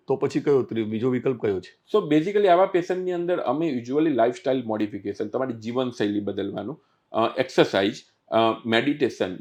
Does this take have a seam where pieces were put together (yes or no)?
no